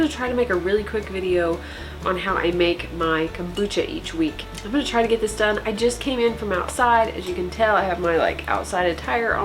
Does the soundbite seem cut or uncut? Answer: cut